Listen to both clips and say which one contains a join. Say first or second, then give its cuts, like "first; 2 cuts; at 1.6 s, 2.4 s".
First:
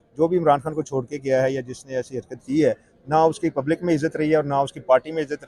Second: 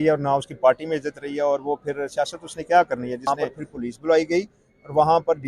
second; 1 cut; at 3.3 s